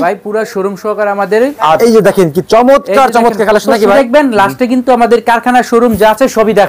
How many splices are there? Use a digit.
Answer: 2